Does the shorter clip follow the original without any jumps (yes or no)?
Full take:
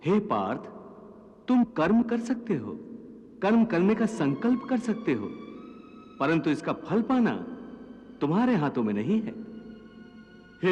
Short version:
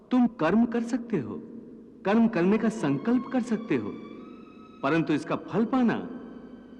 yes